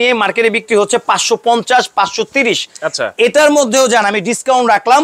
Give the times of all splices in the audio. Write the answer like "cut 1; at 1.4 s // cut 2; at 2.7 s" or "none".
none